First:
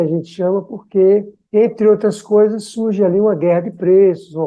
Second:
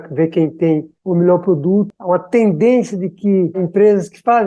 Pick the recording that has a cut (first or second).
second